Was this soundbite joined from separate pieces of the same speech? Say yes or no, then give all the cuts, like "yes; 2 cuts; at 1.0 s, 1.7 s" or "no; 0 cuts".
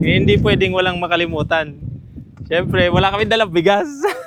no; 0 cuts